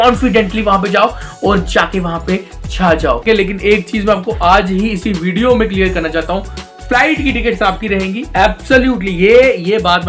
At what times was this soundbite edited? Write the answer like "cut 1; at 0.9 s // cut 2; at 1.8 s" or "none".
cut 1; at 3.2 s